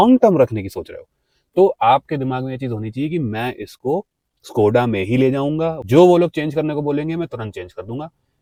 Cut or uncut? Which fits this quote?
uncut